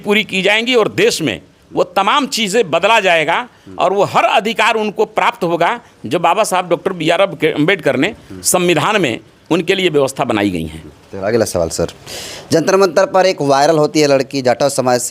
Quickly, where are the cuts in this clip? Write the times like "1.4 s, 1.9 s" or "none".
none